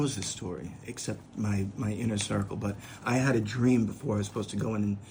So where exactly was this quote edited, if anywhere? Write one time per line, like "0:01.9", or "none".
none